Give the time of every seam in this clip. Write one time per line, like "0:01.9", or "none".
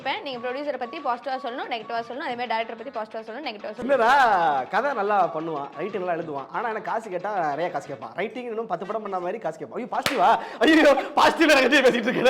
0:03.8